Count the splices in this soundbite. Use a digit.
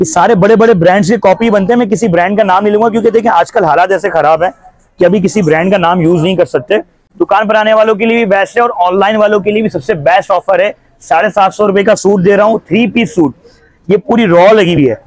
1